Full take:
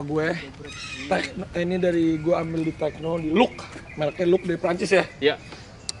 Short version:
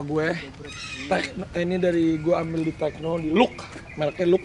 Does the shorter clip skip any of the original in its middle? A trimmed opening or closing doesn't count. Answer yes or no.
no